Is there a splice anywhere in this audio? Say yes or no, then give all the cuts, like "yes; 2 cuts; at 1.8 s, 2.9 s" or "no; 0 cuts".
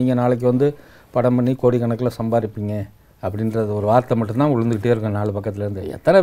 no; 0 cuts